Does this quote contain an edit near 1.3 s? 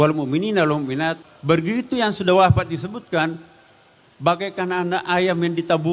yes; 1 cut; at 1.3 s

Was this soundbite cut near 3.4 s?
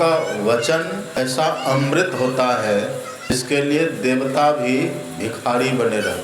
yes; 2 cuts; at 1.2 s, 3.4 s

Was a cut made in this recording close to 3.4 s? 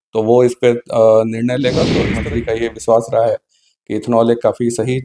no; 1 cut; at 2.1 s

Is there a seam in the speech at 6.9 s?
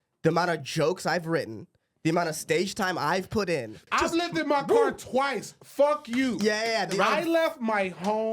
yes; 2 cuts; at 3.7 s, 6.9 s

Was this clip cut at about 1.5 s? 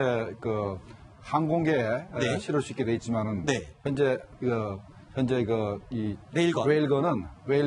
yes; 1 cut; at 1.5 s

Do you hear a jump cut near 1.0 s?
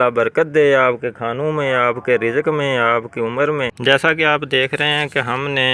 no; 1 cut; at 3.7 s

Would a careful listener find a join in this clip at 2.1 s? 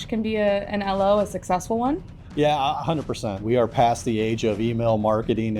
yes; 2 cuts; at 2.1 s, 3.4 s

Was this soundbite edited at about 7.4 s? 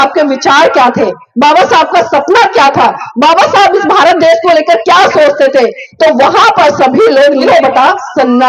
yes; 1 cut; at 7.4 s

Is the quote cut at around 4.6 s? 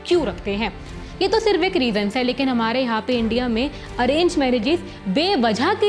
no; 1 cut; at 0.9 s

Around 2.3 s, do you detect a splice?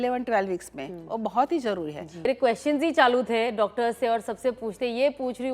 yes; 1 cut; at 2.3 s

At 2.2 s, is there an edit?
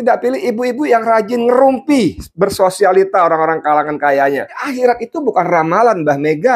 no; 1 cut; at 4.6 s

